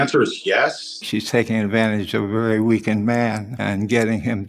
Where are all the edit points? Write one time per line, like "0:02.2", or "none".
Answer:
0:00.9